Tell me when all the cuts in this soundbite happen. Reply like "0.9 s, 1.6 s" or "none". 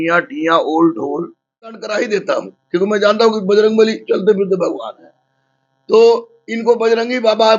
1.8 s